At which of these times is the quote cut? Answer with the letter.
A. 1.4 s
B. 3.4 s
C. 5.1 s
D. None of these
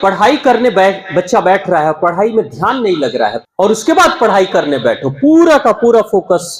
B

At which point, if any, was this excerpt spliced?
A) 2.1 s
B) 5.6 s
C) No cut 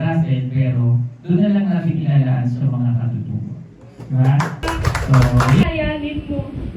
B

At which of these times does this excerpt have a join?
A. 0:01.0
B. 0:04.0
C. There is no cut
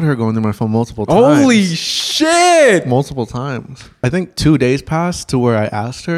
B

